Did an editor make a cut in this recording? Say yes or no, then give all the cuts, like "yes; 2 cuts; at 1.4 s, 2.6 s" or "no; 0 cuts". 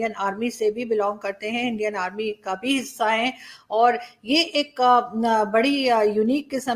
no; 0 cuts